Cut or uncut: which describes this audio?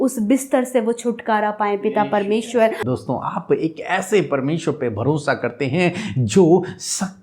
cut